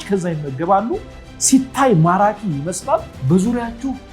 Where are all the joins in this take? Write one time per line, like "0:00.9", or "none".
0:03.1